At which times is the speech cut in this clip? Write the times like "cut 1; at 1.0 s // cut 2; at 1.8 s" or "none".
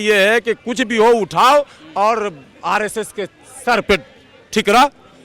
none